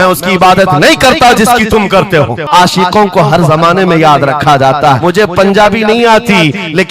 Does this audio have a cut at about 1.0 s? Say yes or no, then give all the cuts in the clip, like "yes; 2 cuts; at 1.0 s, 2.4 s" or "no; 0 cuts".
no; 2 cuts; at 2.5 s, 5.0 s